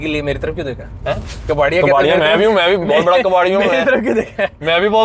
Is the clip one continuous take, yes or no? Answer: yes